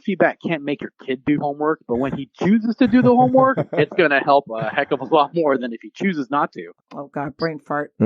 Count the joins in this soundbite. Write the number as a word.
one